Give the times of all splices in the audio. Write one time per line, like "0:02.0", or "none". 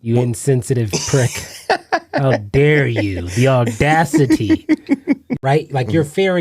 0:05.3